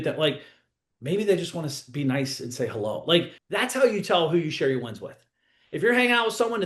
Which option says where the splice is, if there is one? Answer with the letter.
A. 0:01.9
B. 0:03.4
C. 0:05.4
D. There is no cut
B